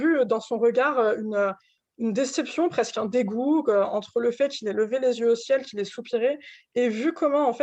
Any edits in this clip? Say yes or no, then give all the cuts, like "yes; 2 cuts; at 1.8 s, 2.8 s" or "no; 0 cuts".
no; 0 cuts